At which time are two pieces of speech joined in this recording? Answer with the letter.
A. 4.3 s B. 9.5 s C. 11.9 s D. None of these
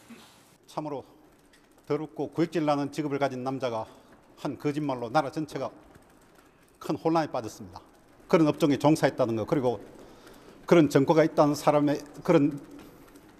B